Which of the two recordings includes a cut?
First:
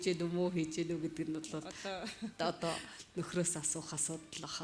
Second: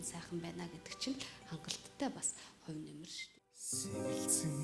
second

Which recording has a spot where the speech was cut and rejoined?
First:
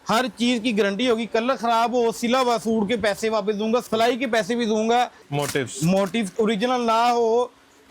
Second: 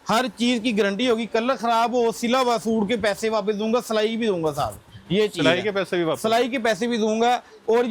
first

